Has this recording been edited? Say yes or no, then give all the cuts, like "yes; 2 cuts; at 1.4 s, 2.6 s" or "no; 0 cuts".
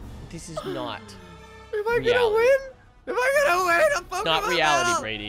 no; 0 cuts